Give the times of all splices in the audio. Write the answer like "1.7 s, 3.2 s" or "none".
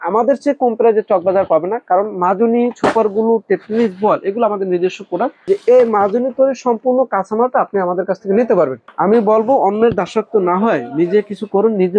5.5 s, 8.8 s